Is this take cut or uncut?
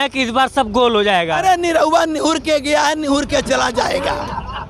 uncut